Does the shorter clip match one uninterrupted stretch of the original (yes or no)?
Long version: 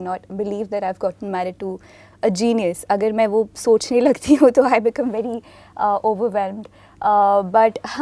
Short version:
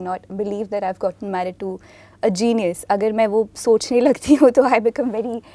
yes